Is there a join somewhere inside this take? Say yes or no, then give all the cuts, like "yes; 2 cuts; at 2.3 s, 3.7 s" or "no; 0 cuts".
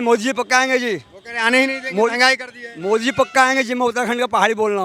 no; 0 cuts